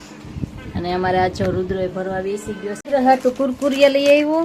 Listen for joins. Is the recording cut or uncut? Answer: cut